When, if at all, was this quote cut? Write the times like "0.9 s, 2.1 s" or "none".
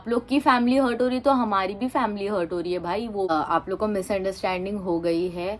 3.3 s